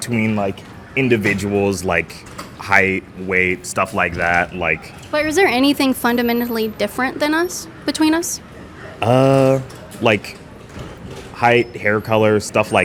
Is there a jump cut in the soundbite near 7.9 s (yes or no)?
no